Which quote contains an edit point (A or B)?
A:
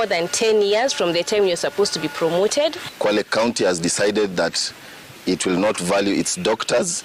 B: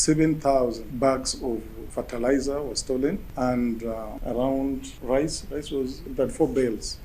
B